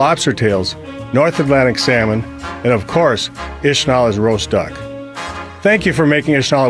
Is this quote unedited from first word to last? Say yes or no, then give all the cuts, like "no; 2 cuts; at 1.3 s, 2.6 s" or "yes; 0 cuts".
yes; 0 cuts